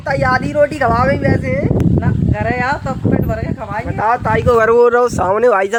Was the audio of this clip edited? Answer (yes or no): no